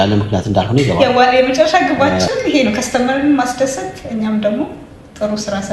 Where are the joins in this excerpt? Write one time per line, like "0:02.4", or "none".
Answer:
0:01.0